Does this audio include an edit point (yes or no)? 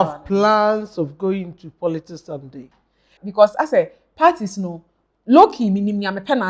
yes